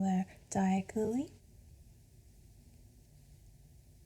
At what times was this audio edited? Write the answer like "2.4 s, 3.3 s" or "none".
1.4 s